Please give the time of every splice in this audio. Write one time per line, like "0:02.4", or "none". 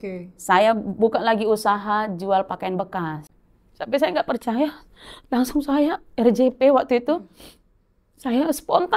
0:03.2